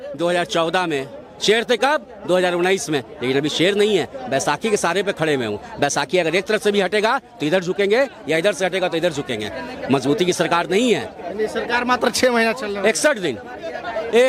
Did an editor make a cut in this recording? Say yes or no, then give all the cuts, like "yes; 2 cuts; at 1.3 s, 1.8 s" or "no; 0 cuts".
no; 0 cuts